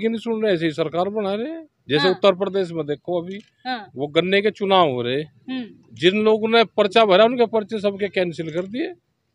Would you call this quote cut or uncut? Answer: uncut